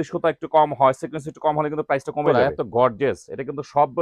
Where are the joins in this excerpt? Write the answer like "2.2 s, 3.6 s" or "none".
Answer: 2.2 s